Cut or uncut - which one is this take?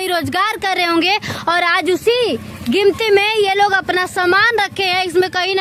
uncut